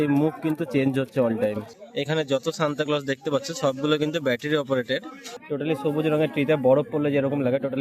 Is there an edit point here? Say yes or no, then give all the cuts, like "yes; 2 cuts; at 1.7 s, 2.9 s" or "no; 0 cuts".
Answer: yes; 2 cuts; at 1.7 s, 5.3 s